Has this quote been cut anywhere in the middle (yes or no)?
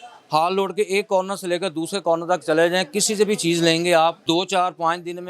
yes